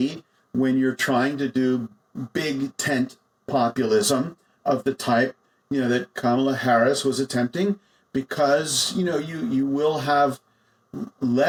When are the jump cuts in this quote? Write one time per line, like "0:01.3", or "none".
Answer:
none